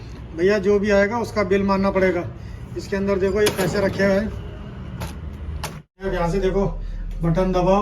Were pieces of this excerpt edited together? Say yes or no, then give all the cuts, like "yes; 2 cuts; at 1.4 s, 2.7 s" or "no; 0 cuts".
yes; 1 cut; at 6.1 s